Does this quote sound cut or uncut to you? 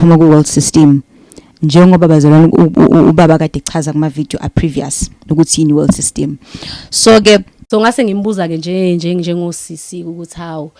cut